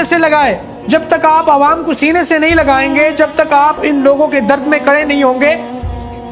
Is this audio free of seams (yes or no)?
yes